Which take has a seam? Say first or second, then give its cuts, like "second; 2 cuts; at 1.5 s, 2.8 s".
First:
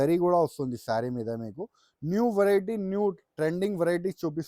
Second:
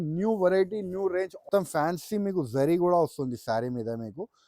second; 1 cut; at 1.5 s